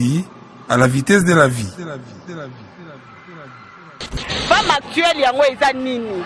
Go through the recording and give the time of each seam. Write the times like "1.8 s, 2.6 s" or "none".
4.1 s